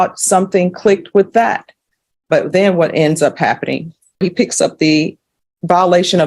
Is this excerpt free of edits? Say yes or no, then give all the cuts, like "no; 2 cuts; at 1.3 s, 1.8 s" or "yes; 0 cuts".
no; 1 cut; at 4.2 s